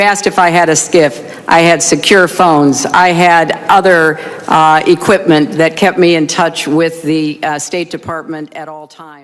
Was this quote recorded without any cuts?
yes; 0 cuts

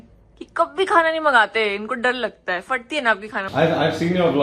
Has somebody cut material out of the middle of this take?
yes; 1 cut; at 3.4 s

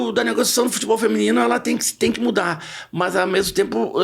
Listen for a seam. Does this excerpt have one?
no; 0 cuts

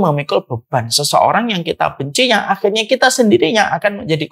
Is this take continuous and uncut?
yes; 0 cuts

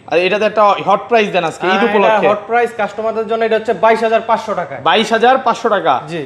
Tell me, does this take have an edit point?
no; 0 cuts

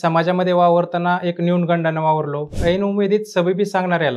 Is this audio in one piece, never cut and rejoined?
no; 1 cut; at 2.5 s

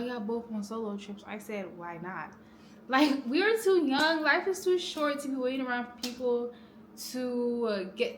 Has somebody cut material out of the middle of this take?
no; 0 cuts

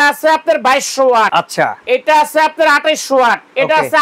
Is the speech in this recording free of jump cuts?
no; 1 cut; at 1.3 s

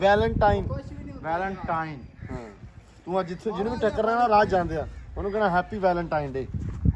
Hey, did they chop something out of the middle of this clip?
no; 0 cuts

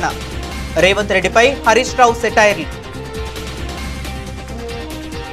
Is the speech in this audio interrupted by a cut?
yes; 1 cut; at 2.7 s

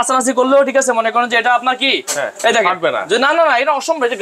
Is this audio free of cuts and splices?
yes; 0 cuts

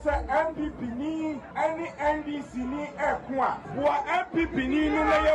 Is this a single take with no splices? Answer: no; 2 cuts; at 1.4 s, 3.6 s

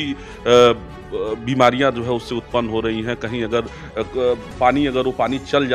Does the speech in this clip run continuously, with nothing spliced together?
yes; 0 cuts

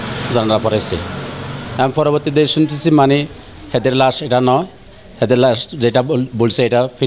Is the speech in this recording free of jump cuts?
yes; 0 cuts

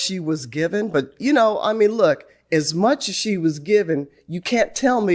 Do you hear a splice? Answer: no; 0 cuts

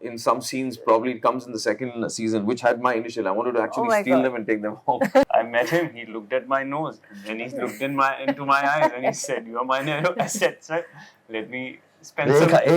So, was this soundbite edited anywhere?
yes; 1 cut; at 5.3 s

